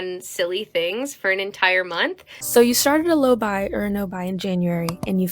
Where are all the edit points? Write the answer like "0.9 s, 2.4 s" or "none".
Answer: 2.3 s